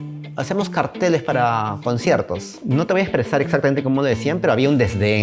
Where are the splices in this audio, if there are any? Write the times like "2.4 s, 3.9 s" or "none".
2.5 s